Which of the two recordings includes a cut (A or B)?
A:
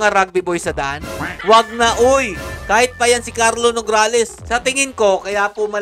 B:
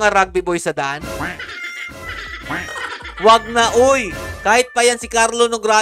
A